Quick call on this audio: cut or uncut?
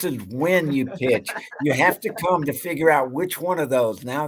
uncut